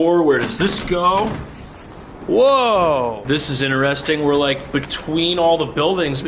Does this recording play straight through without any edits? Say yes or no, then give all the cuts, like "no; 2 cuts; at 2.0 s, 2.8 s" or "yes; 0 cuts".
yes; 0 cuts